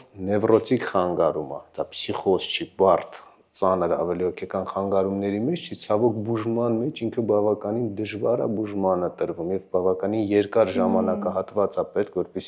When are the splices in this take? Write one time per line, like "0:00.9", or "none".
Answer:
none

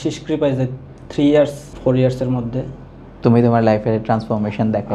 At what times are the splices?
none

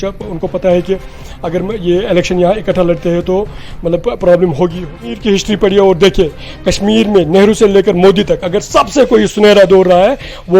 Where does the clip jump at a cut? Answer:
0:05.1

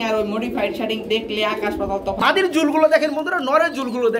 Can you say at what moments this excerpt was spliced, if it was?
0:02.2

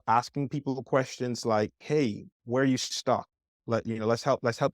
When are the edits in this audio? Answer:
0:02.3

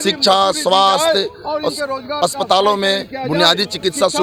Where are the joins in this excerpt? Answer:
none

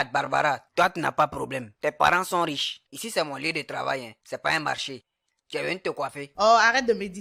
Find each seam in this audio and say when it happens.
none

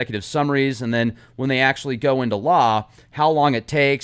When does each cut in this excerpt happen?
none

